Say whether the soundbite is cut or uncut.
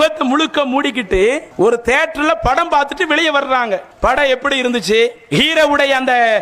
cut